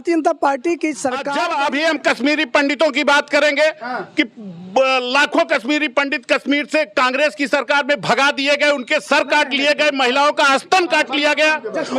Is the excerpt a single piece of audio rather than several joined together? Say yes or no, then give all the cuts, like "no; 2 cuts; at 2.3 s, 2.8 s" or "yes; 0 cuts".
no; 1 cut; at 1.2 s